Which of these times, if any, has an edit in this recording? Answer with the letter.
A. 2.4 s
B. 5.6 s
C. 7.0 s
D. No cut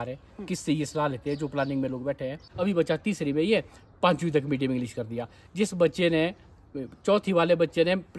A